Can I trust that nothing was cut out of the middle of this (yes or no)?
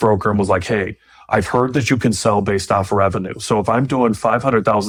yes